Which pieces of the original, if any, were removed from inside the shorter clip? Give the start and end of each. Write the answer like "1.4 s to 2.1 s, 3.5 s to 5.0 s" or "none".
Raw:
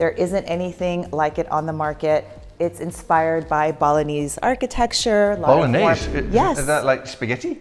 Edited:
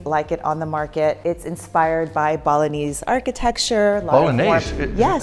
2.3 s to 2.5 s